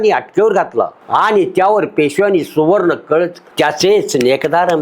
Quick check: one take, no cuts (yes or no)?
no